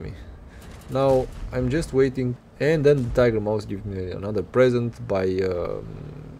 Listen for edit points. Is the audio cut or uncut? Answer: cut